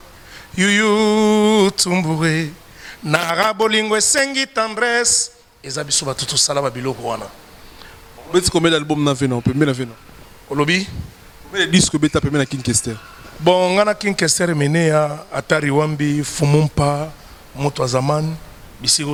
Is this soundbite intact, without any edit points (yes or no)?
yes